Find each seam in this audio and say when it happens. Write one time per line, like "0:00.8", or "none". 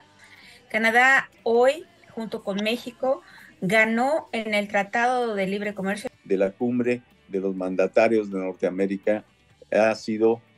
0:06.1